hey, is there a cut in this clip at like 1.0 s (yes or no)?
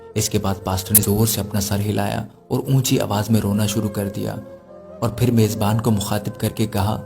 yes